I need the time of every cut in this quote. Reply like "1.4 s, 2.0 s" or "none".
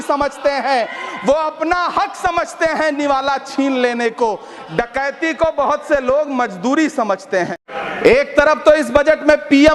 7.6 s